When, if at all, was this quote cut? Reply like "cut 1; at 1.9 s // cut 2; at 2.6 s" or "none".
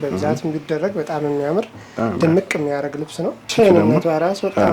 cut 1; at 3.5 s